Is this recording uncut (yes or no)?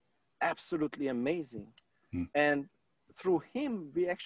yes